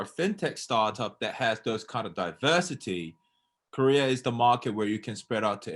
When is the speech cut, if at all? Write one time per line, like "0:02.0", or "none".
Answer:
none